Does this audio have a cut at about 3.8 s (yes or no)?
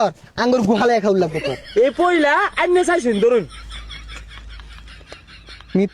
no